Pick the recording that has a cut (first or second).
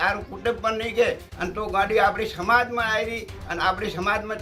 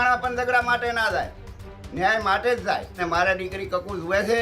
second